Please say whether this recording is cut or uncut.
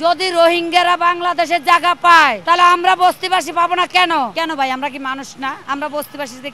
cut